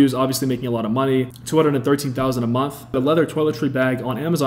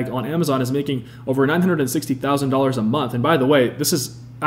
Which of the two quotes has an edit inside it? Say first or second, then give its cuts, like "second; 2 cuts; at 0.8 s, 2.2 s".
first; 2 cuts; at 1.4 s, 3.0 s